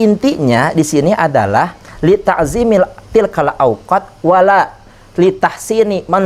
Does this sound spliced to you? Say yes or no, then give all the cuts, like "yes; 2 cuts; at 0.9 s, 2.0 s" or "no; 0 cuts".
no; 0 cuts